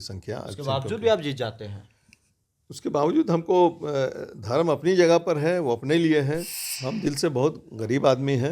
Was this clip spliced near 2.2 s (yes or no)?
no